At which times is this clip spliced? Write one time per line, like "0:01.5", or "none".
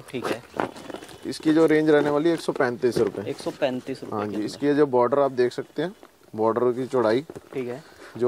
none